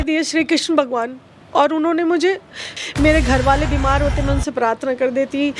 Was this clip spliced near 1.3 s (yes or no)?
no